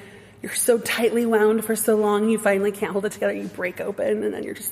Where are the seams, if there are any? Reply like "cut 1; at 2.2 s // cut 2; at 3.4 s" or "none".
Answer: none